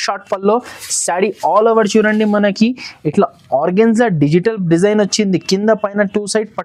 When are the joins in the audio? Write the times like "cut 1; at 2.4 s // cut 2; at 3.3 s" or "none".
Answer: none